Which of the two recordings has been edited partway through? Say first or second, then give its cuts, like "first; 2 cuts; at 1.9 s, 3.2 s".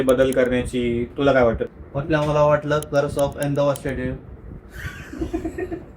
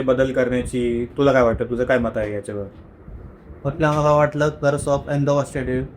first; 1 cut; at 1.6 s